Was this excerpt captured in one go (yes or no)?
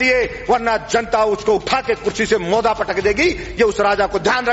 yes